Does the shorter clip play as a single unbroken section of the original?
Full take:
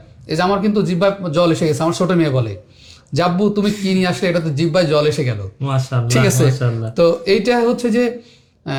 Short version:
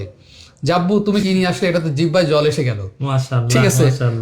no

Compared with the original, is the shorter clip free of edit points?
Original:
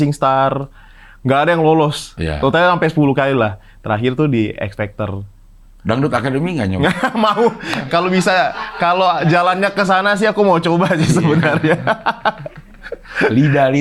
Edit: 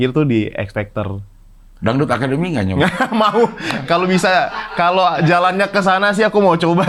yes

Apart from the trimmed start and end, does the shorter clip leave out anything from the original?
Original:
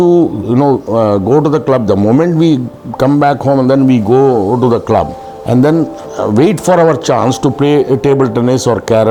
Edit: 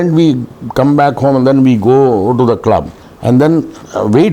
no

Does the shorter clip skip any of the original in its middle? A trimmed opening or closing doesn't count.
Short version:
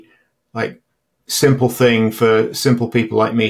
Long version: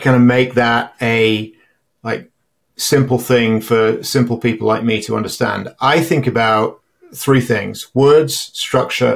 no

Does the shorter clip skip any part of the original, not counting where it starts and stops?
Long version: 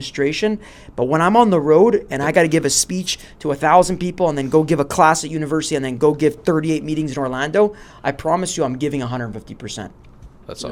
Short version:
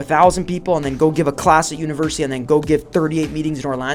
no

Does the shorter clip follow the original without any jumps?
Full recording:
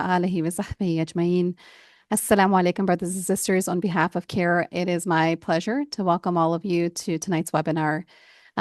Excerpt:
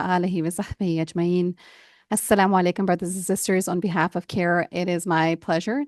yes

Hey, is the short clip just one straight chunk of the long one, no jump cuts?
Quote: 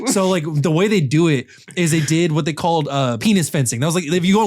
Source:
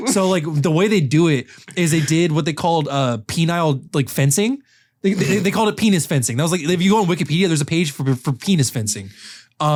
no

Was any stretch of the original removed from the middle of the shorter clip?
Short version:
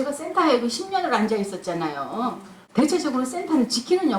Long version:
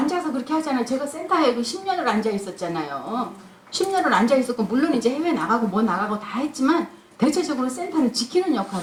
yes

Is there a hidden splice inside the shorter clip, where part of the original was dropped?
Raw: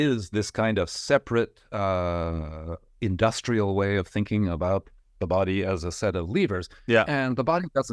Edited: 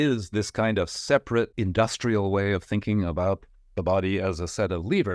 yes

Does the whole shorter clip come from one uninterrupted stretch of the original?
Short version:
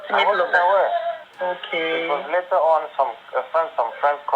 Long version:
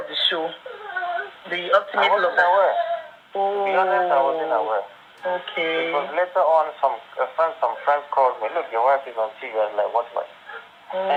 no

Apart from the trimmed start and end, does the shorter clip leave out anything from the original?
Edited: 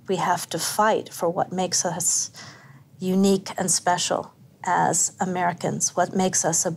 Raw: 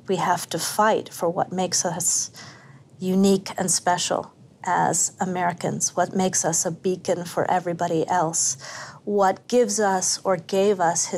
no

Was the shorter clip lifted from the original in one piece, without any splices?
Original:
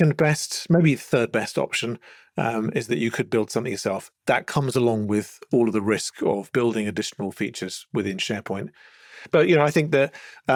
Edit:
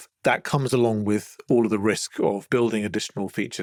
yes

